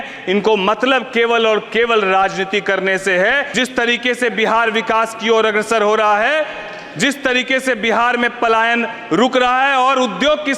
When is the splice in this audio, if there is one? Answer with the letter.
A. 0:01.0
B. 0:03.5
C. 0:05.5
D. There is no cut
B